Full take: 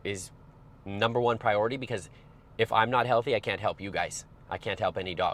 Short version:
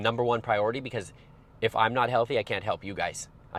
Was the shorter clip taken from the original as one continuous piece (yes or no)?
yes